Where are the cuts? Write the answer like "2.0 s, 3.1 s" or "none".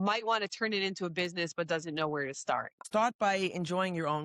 2.8 s